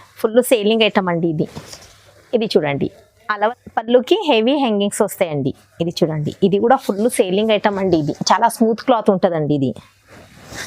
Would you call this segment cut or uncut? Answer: cut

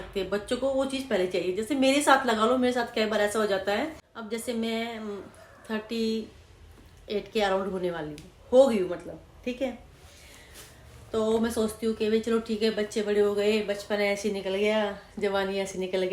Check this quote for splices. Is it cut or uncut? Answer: uncut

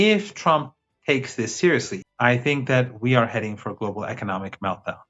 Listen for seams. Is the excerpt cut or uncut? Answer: cut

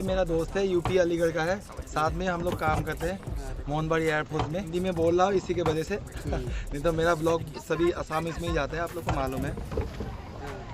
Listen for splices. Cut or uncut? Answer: cut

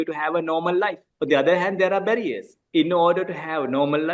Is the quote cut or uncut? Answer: cut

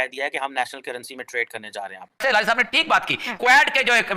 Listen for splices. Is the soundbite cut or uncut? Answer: cut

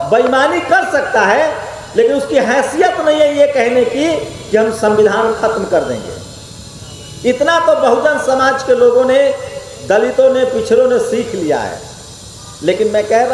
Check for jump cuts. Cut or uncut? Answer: uncut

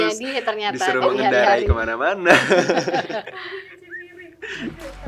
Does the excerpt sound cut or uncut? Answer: uncut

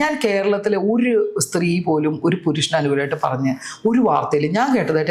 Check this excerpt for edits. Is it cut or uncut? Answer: uncut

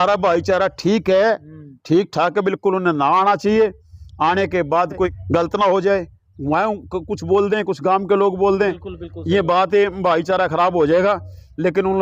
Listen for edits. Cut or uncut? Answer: uncut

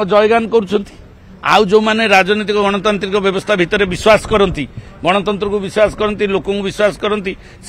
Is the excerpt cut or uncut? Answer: uncut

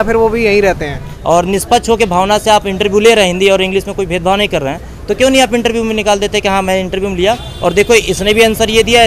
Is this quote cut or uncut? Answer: cut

